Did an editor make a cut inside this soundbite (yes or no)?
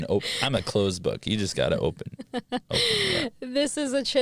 no